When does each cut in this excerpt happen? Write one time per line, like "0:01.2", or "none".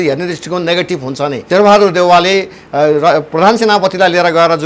0:01.4